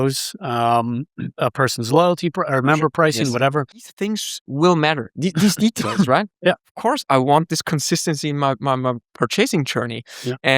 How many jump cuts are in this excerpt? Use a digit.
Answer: 2